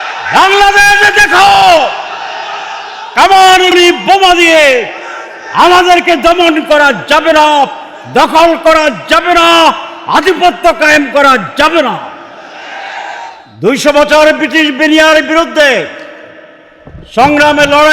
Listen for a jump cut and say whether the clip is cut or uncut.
cut